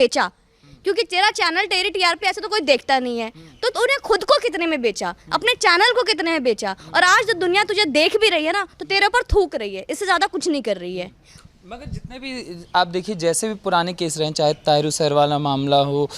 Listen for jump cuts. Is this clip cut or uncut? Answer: uncut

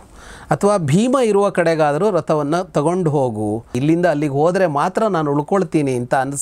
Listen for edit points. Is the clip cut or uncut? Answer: cut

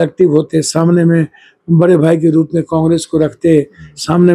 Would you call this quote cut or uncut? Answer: uncut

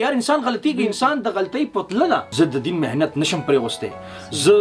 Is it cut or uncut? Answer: cut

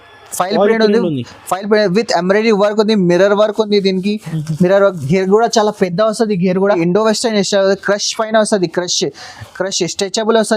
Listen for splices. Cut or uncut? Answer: cut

